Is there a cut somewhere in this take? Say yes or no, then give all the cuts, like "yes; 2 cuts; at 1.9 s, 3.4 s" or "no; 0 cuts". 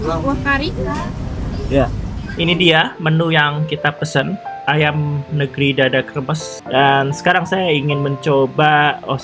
yes; 1 cut; at 6.5 s